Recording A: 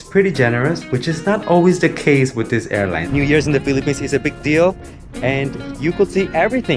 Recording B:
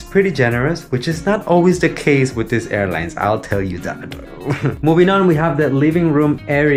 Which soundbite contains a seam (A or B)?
A